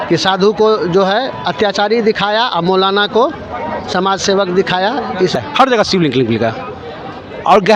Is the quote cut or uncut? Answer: cut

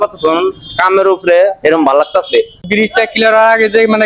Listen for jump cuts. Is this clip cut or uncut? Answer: cut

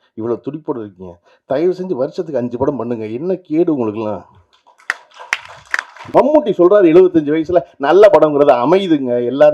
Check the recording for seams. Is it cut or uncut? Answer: cut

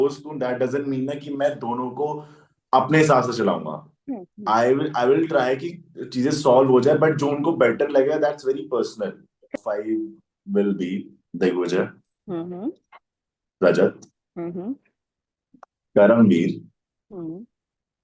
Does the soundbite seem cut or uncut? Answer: cut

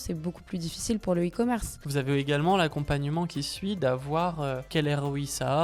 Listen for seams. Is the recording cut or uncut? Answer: cut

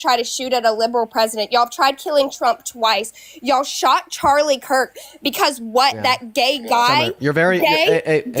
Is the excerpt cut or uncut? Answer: uncut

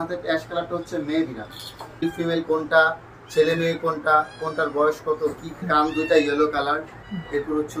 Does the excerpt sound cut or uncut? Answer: cut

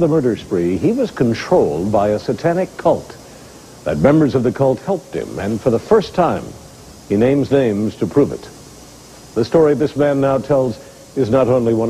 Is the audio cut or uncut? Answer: cut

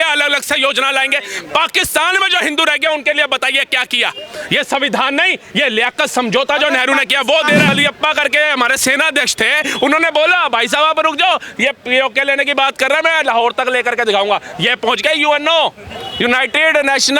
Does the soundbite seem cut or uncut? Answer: cut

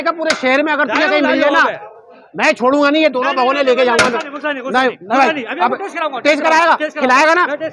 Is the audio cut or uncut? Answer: uncut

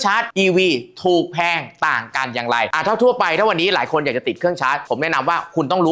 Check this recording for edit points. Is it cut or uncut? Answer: uncut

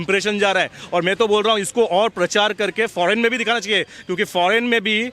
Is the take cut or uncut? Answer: uncut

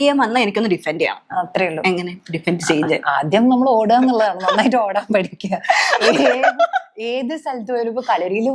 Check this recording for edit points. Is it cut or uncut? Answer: uncut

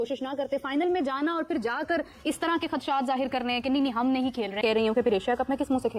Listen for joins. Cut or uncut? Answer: uncut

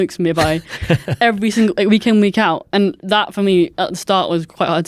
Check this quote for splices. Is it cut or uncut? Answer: uncut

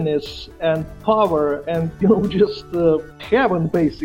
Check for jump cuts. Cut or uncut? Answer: cut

